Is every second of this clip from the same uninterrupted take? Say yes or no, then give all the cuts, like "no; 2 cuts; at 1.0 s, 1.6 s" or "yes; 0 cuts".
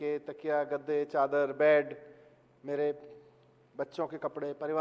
yes; 0 cuts